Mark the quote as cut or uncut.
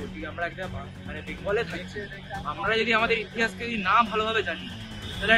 uncut